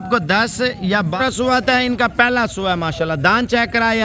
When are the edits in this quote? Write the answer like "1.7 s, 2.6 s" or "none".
1.2 s

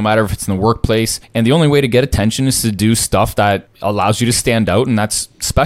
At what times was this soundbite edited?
1.2 s, 3.7 s

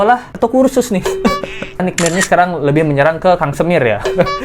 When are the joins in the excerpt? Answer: 1.8 s

